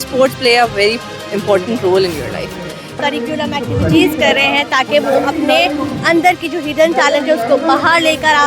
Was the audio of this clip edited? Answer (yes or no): yes